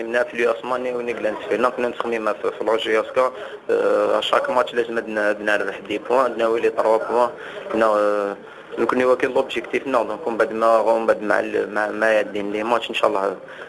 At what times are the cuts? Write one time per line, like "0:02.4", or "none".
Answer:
none